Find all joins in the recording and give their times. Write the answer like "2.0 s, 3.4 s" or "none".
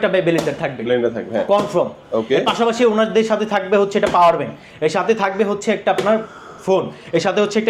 none